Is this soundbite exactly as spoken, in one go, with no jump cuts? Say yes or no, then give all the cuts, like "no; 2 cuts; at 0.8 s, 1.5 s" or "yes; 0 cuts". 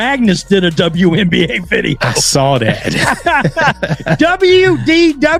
yes; 0 cuts